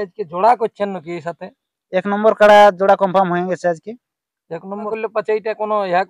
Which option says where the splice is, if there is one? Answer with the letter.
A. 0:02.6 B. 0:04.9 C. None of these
B